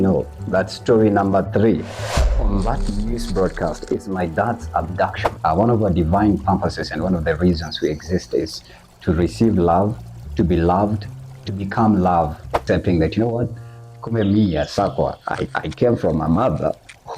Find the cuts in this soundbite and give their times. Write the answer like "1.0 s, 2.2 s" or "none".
5.2 s, 12.6 s